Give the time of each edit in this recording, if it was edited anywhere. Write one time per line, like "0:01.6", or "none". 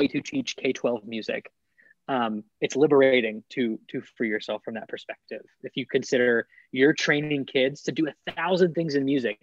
none